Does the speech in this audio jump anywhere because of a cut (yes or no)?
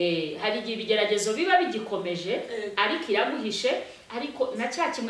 no